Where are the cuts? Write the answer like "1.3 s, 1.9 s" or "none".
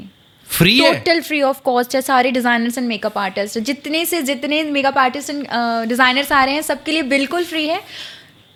none